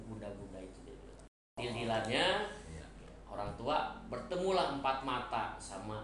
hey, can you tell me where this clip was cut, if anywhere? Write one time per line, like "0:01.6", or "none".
0:01.3